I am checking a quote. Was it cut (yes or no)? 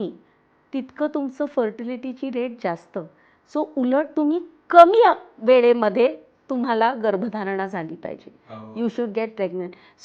no